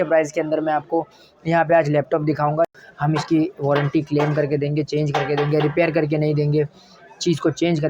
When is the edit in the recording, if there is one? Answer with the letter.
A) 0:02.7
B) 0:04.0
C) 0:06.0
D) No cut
A